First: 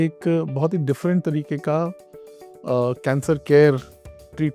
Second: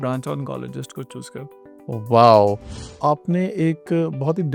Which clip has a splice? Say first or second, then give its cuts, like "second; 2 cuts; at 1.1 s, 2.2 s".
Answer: second; 1 cut; at 2.7 s